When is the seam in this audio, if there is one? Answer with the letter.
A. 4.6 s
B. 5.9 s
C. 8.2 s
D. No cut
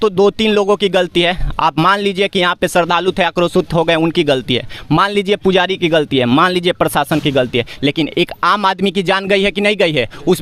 D